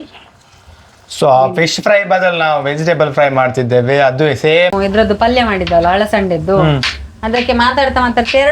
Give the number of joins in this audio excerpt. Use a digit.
1